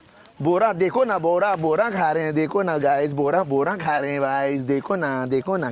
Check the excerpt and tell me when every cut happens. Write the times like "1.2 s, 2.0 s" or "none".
none